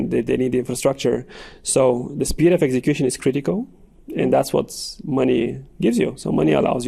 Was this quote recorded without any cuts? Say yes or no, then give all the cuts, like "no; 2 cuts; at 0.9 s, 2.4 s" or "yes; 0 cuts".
yes; 0 cuts